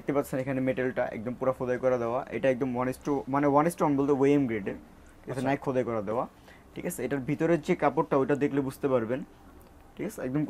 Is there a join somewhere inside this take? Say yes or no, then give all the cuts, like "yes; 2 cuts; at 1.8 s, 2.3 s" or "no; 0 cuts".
no; 0 cuts